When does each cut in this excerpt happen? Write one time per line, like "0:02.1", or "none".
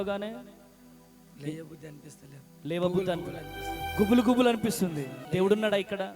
0:05.1